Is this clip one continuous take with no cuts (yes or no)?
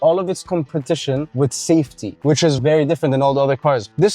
no